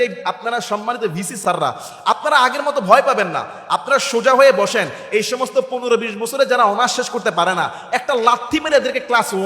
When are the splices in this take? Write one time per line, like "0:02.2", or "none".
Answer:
0:01.4